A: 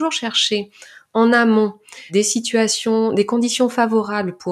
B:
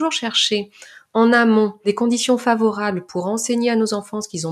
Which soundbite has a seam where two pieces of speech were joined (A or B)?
B